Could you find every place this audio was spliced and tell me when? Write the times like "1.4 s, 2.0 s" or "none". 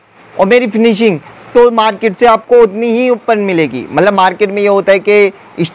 none